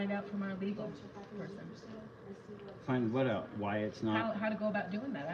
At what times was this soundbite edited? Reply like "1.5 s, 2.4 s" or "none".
none